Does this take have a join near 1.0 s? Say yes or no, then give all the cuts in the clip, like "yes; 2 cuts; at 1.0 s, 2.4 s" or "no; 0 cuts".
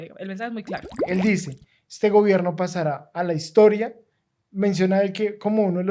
yes; 1 cut; at 1.0 s